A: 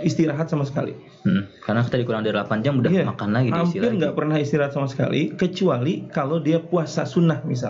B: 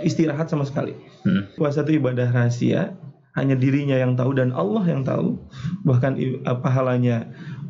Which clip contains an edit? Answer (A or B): B